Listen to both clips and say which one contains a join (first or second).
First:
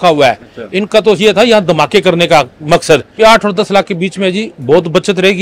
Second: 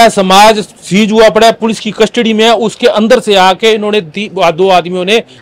first